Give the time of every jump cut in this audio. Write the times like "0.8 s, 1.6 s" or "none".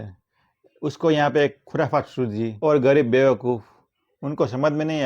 2.5 s